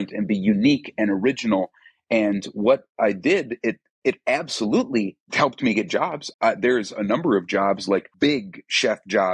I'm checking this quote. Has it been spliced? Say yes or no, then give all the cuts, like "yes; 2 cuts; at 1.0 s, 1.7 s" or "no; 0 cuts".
yes; 3 cuts; at 5.2 s, 6.2 s, 8.1 s